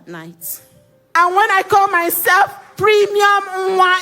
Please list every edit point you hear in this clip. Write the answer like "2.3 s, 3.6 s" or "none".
1.1 s